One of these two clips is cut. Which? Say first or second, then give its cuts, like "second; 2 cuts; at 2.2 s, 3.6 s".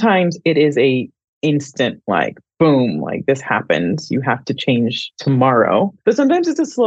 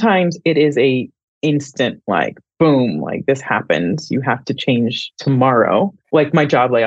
first; 1 cut; at 6.0 s